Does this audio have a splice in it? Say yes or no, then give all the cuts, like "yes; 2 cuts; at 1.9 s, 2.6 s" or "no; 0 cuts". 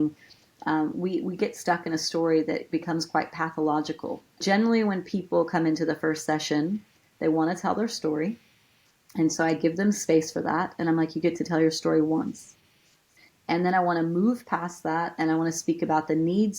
yes; 2 cuts; at 4.4 s, 13.0 s